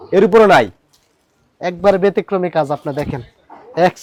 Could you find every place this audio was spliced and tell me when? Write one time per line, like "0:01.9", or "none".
none